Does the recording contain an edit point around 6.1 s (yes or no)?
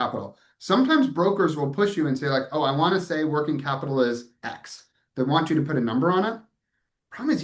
no